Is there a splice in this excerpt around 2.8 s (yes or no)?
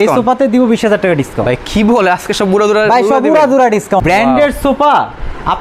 no